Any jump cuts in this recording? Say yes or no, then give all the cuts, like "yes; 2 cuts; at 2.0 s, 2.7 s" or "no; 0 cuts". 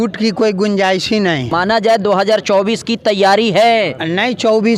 yes; 1 cut; at 1.5 s